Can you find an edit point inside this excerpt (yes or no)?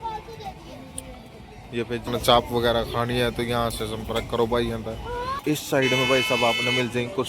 yes